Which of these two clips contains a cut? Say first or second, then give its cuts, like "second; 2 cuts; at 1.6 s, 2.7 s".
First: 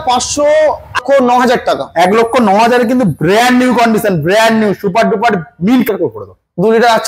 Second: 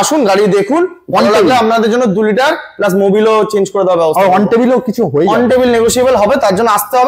first; 2 cuts; at 1.0 s, 5.9 s